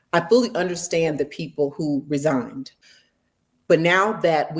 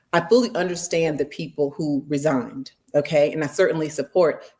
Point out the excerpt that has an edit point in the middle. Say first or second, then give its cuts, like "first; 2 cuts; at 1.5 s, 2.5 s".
first; 1 cut; at 2.8 s